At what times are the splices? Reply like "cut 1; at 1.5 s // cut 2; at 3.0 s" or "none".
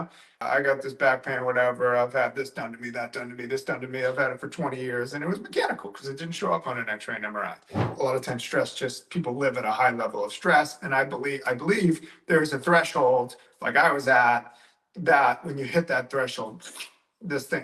cut 1; at 7.9 s